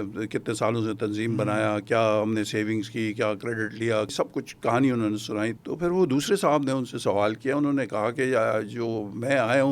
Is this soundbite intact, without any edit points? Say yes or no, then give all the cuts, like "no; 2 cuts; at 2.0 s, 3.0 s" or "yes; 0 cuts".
no; 2 cuts; at 4.1 s, 5.6 s